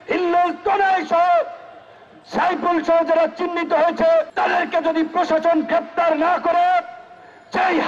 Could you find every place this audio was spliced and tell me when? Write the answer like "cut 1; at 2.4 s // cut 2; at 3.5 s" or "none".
cut 1; at 4.3 s